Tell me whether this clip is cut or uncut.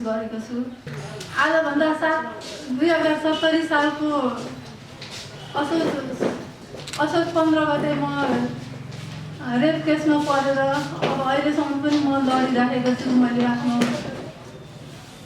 cut